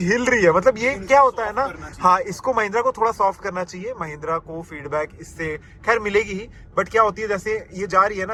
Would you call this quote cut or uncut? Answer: uncut